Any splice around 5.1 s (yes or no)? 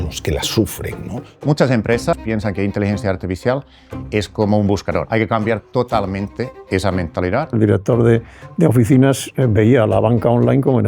yes